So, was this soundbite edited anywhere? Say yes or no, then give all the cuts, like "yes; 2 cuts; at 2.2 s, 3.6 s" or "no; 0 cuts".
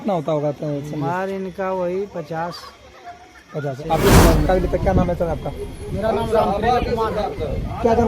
yes; 1 cut; at 4.4 s